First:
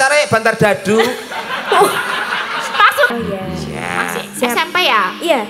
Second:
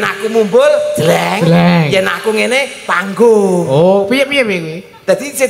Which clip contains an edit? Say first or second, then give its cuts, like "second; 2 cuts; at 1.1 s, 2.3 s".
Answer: first; 1 cut; at 3.1 s